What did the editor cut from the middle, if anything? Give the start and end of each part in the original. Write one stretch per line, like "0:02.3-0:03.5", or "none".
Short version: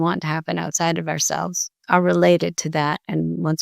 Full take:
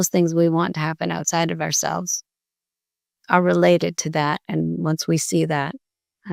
0:02.2-0:03.1